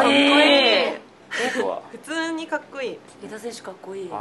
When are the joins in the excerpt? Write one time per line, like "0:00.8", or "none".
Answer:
0:03.1